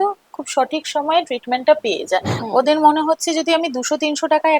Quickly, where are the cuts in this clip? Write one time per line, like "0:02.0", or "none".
0:02.3